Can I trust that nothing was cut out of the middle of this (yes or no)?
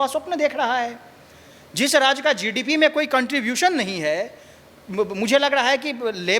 yes